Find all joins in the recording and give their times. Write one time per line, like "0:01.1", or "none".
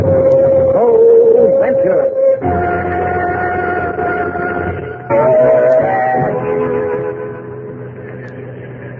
none